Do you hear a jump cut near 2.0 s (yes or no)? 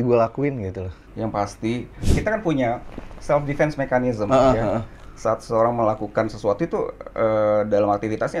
yes